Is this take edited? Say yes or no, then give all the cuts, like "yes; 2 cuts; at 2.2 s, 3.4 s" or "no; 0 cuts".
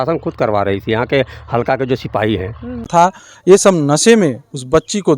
yes; 1 cut; at 2.9 s